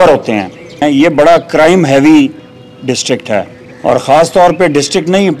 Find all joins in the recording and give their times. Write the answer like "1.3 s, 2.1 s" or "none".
0.8 s, 3.6 s

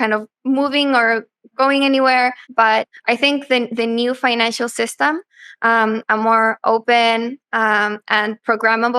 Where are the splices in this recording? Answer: 2.7 s

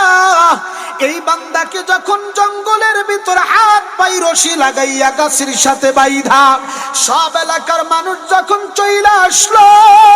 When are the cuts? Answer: 2.3 s

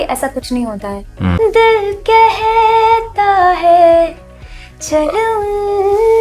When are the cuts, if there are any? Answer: 1.4 s

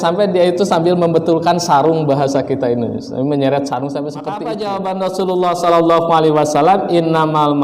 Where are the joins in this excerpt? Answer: 4.4 s

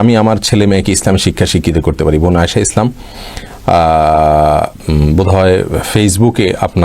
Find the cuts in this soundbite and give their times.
none

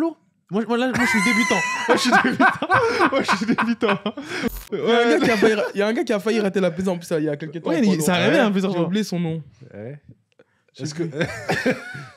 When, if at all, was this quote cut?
4.6 s

